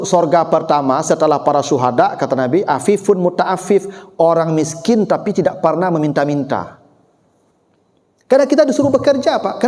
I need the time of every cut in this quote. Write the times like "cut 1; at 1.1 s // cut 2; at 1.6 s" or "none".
none